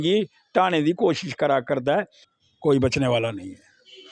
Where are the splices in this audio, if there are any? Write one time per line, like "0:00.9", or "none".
0:02.2